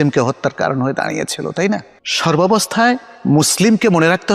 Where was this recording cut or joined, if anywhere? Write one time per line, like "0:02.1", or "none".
none